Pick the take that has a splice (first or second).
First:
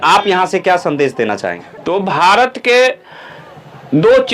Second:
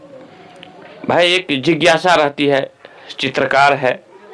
first